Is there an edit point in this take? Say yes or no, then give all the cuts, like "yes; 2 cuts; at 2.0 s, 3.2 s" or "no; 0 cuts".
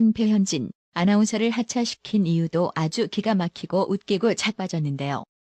yes; 1 cut; at 1.4 s